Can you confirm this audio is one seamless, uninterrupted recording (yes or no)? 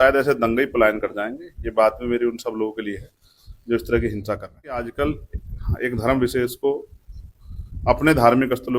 no